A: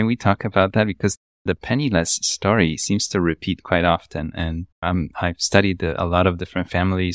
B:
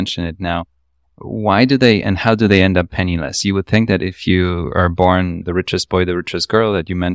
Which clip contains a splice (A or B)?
B